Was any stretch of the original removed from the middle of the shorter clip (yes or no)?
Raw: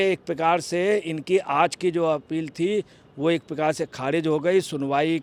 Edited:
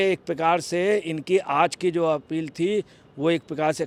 no